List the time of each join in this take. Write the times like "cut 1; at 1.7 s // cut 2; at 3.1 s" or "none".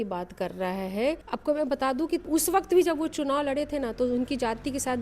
cut 1; at 1.2 s // cut 2; at 2.2 s